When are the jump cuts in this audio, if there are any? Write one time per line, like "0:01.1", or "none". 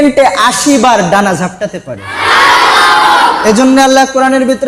0:02.1